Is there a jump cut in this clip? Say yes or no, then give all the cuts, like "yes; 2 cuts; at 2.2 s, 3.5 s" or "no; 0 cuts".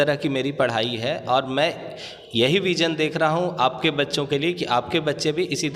no; 0 cuts